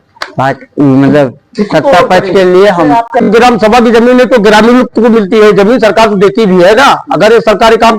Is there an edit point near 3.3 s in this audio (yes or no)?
yes